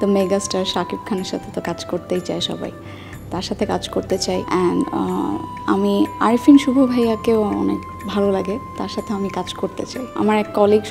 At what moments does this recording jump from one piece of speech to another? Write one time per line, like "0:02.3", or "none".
0:04.4
0:05.5
0:10.2